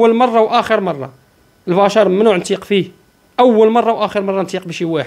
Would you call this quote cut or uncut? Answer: uncut